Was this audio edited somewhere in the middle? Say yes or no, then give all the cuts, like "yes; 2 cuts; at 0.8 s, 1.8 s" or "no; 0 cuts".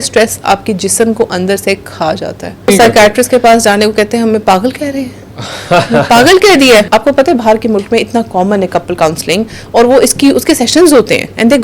yes; 2 cuts; at 2.7 s, 6.9 s